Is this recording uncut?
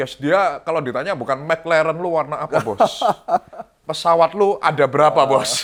yes; 0 cuts

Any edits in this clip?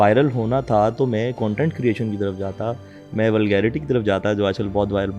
no; 0 cuts

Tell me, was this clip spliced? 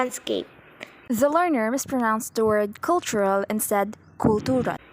no; 0 cuts

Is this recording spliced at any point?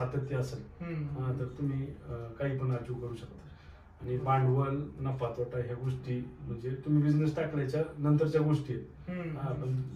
no; 0 cuts

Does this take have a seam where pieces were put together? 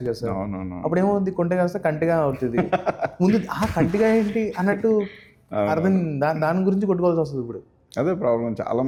no; 0 cuts

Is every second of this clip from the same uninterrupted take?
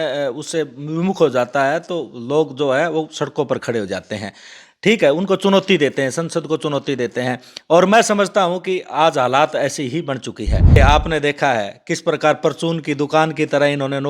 no; 1 cut; at 10.8 s

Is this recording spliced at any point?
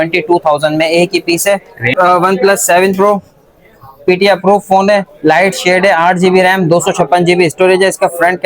yes; 1 cut; at 1.9 s

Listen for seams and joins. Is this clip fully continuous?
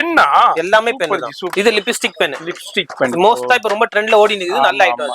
no; 1 cut; at 1.5 s

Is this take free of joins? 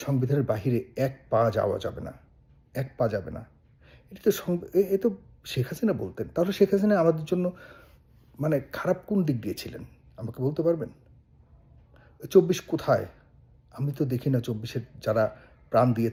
yes; 0 cuts

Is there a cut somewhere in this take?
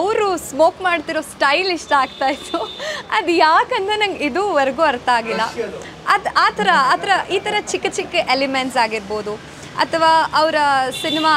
no; 0 cuts

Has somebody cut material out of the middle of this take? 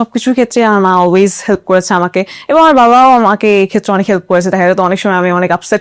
no; 0 cuts

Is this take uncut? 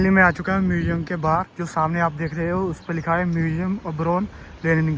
yes; 0 cuts

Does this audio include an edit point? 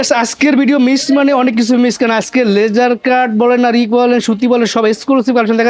no; 0 cuts

